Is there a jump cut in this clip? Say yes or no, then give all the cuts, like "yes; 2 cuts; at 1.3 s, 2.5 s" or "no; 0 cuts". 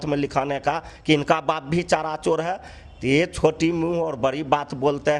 no; 0 cuts